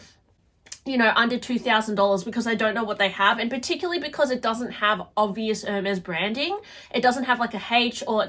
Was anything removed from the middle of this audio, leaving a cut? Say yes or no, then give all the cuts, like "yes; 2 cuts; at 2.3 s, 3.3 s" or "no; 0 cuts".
no; 0 cuts